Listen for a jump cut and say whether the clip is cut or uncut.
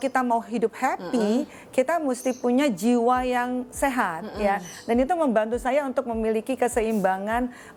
uncut